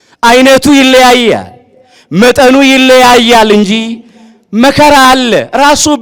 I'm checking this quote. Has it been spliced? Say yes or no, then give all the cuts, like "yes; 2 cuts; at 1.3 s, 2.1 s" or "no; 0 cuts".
no; 0 cuts